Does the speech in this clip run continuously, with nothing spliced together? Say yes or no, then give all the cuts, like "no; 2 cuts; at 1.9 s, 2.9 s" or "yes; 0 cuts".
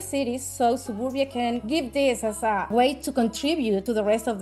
yes; 0 cuts